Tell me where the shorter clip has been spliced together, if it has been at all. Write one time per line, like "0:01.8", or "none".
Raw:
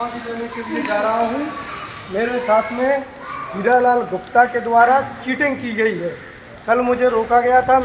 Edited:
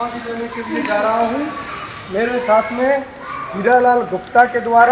none